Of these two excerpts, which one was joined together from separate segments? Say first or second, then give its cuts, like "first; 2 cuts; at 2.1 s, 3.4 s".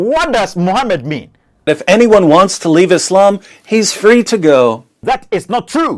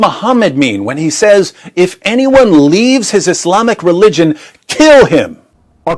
first; 2 cuts; at 1.8 s, 5.0 s